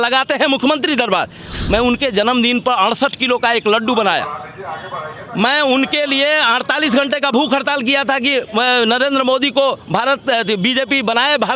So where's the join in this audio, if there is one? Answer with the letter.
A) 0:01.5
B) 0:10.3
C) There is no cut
A